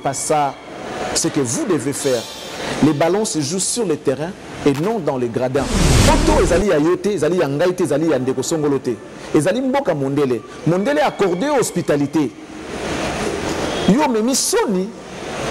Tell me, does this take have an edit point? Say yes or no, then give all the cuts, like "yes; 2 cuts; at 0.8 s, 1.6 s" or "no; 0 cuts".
yes; 1 cut; at 6.1 s